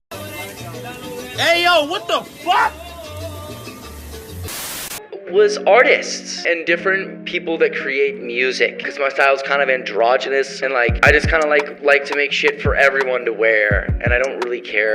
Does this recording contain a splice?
no; 0 cuts

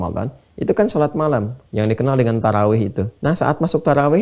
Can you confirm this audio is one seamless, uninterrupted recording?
no; 2 cuts; at 1.6 s, 3.1 s

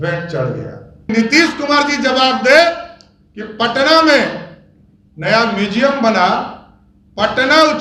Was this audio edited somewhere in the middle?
yes; 1 cut; at 1.1 s

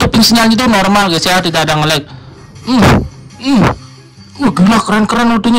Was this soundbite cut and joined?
no; 0 cuts

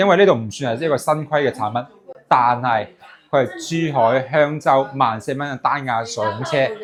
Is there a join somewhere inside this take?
no; 0 cuts

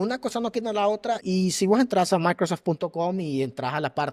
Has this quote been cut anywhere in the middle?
yes; 1 cut; at 1.2 s

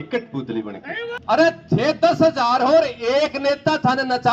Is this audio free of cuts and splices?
no; 1 cut; at 1.1 s

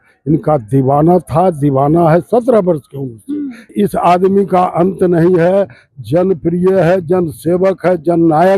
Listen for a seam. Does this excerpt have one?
yes; 1 cut; at 3.7 s

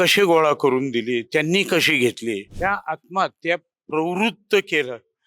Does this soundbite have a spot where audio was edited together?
yes; 1 cut; at 2.5 s

